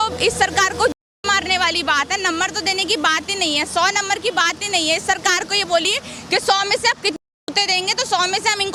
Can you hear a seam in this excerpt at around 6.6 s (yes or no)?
no